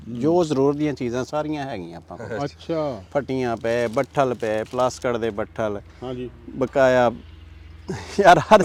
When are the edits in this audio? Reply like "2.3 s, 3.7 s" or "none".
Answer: none

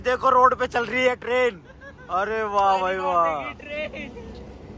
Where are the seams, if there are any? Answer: none

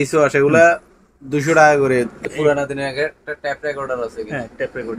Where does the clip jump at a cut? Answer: 2.2 s

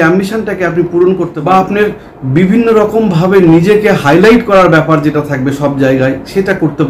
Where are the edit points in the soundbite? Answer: 1.3 s

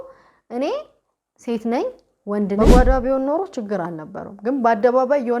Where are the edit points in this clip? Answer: 2.6 s

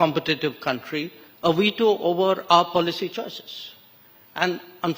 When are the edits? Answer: none

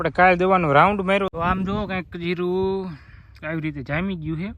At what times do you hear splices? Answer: 1.3 s

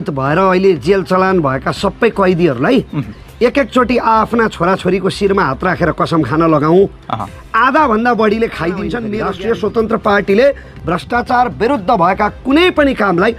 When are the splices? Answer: 9.0 s

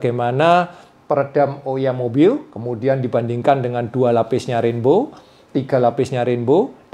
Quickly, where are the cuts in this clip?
none

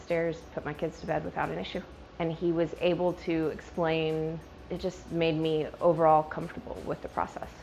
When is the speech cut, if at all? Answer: 2.0 s, 4.5 s

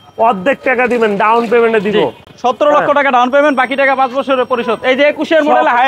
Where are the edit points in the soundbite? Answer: none

